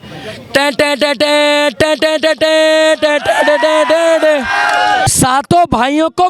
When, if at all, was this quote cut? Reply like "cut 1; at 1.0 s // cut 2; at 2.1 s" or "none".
cut 1; at 5.1 s

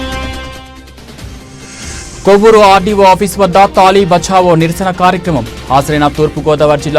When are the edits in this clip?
cut 1; at 1.9 s

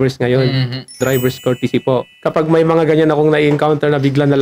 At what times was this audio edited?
cut 1; at 1.0 s // cut 2; at 2.1 s

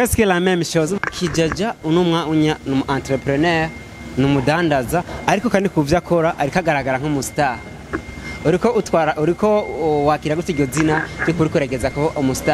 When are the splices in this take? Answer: cut 1; at 1.0 s

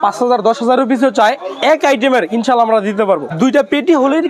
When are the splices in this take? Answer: cut 1; at 3.3 s

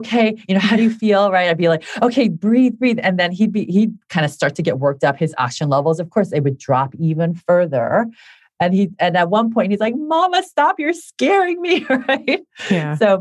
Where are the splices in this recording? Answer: none

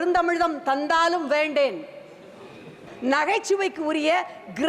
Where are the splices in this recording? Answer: cut 1; at 2.9 s

